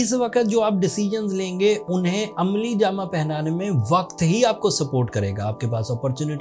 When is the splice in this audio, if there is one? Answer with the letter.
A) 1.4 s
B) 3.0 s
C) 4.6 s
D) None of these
D